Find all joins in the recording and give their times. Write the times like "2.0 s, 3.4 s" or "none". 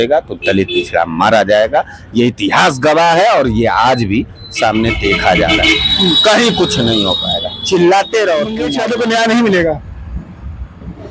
8.7 s